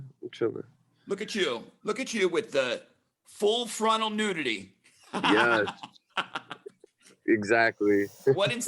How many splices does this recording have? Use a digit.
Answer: 1